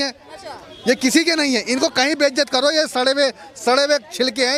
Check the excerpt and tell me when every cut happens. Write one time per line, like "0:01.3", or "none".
none